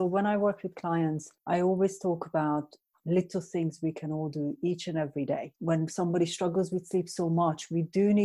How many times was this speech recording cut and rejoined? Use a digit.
2